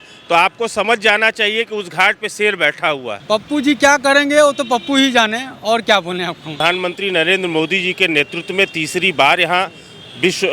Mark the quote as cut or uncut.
cut